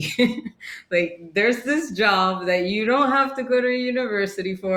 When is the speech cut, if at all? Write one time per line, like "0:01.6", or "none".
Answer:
none